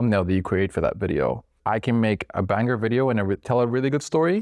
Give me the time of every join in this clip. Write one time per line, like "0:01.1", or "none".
0:01.5